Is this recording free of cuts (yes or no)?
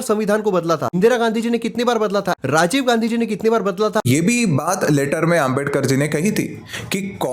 no